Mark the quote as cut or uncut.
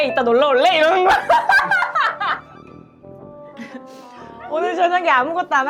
uncut